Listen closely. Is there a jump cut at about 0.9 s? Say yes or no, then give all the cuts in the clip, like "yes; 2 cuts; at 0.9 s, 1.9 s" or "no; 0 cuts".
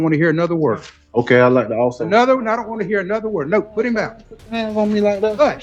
no; 0 cuts